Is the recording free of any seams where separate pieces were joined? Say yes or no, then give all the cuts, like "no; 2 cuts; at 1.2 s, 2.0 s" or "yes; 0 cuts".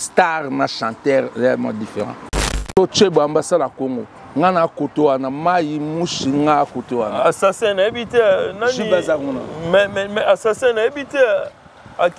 no; 1 cut; at 2.6 s